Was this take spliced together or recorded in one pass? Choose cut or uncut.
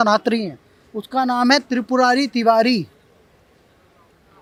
uncut